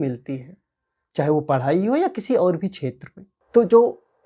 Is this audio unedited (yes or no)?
yes